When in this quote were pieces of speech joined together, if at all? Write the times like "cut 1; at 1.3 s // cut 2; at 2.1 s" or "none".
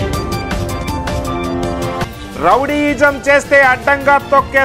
cut 1; at 2.0 s